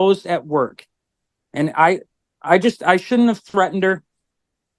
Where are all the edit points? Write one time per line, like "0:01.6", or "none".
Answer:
none